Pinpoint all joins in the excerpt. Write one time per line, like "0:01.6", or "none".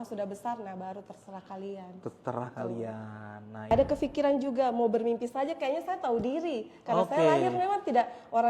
0:03.7